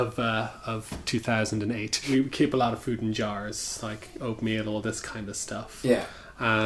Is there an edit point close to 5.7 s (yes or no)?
no